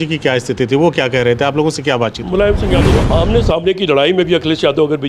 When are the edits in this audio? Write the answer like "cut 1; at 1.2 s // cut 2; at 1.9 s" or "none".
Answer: cut 1; at 2.9 s